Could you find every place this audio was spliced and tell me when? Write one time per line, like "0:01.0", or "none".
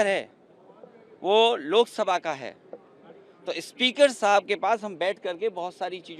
none